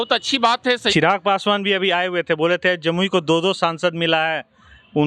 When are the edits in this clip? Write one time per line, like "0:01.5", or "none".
0:00.9